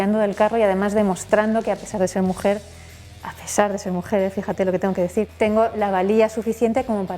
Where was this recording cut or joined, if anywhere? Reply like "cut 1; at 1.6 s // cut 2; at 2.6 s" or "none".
cut 1; at 5.3 s